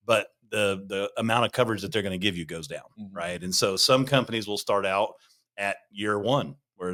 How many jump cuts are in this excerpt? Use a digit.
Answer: 0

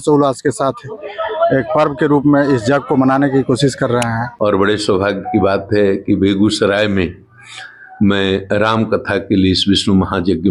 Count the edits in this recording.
1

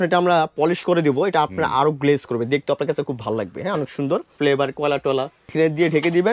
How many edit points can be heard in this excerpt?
2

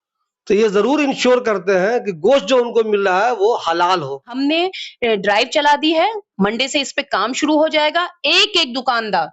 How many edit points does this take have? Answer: 1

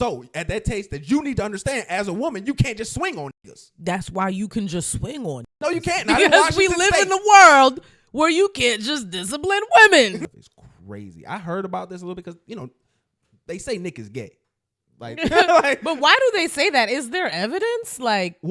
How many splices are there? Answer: 1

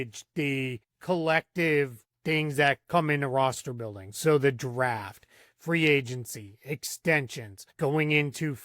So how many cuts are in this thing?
3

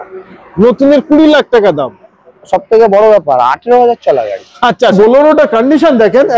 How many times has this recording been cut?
1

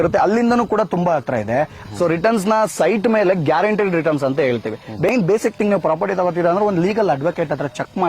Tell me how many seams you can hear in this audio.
2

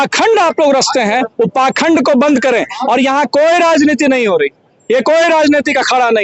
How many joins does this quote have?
0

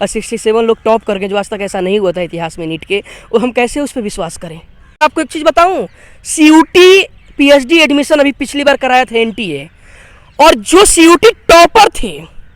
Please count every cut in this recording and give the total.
1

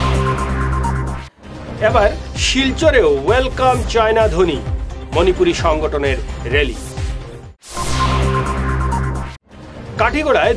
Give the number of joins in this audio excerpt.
1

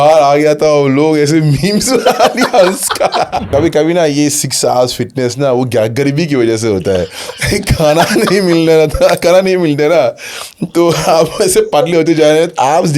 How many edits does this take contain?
1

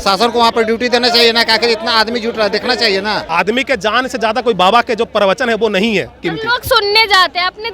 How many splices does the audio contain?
1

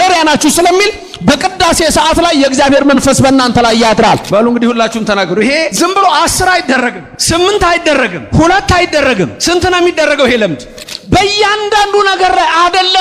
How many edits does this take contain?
6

